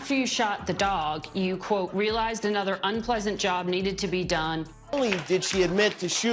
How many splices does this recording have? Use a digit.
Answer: 1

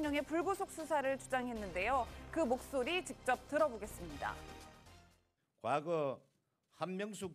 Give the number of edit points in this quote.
1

